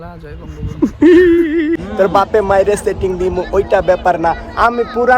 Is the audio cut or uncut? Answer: cut